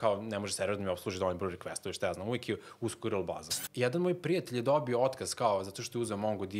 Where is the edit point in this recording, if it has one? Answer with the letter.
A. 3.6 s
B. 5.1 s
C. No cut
A